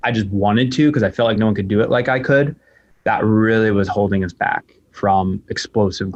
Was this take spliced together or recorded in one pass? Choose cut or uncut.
uncut